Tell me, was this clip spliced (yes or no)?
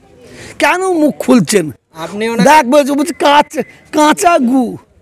no